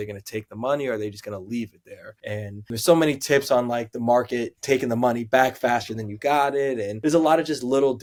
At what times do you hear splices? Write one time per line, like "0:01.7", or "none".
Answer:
none